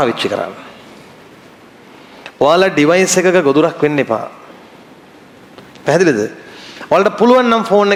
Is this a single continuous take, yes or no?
yes